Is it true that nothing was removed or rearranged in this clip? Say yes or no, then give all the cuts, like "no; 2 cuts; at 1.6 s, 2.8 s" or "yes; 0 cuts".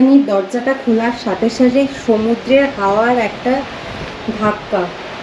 yes; 0 cuts